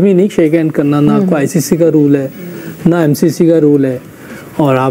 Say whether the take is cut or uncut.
uncut